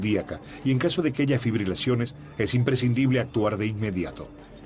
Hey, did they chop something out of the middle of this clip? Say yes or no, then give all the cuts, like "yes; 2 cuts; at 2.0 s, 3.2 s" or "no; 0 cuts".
yes; 1 cut; at 2.6 s